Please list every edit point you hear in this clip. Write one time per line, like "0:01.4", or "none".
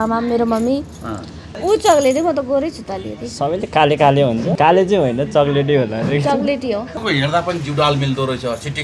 0:01.4
0:04.5
0:07.0